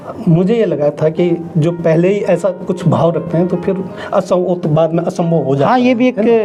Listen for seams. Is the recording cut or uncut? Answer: uncut